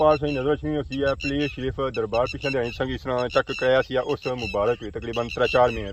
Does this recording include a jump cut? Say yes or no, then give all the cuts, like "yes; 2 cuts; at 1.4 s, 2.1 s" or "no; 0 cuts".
no; 0 cuts